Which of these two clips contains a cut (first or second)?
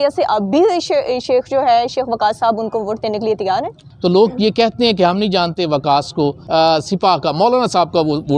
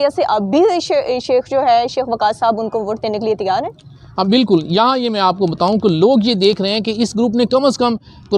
first